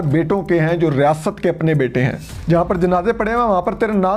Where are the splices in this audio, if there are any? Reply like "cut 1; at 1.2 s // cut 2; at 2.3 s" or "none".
cut 1; at 2.3 s